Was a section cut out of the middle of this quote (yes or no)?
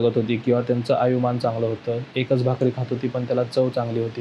no